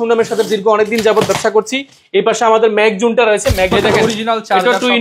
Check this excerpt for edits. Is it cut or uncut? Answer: cut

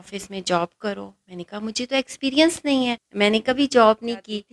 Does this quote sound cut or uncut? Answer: cut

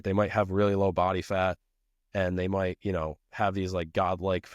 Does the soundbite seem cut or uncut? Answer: uncut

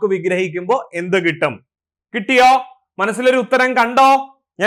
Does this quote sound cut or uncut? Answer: uncut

